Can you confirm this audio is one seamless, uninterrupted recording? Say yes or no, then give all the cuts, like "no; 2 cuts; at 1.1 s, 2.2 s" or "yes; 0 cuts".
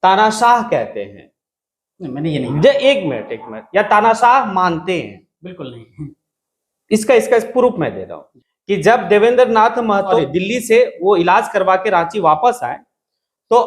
yes; 0 cuts